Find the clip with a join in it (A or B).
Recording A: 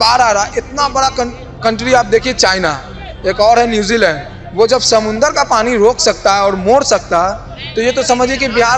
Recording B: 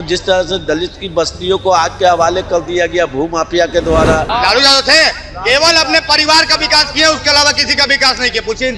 B